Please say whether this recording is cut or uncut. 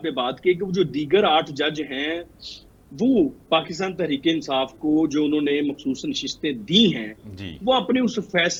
uncut